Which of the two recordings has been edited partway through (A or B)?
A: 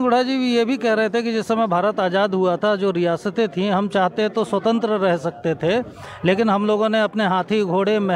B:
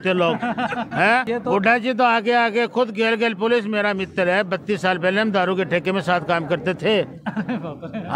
B